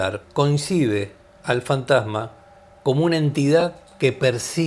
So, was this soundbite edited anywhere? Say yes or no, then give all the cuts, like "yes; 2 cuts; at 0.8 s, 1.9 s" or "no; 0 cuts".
no; 0 cuts